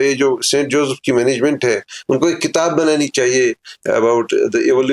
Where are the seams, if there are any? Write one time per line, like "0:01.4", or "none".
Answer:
none